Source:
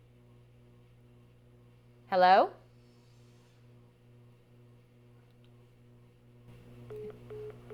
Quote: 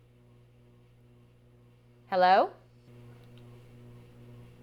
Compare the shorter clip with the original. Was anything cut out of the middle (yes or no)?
yes